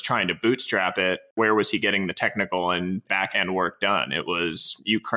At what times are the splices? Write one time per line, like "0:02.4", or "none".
0:01.3
0:03.1